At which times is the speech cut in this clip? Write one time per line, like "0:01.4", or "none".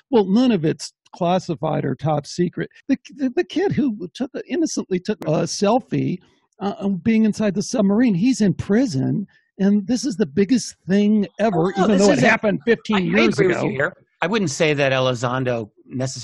0:02.8
0:05.2